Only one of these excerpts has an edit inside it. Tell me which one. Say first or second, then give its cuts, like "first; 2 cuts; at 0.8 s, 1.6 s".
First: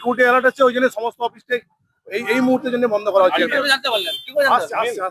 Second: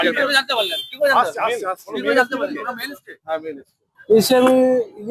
second; 1 cut; at 4.0 s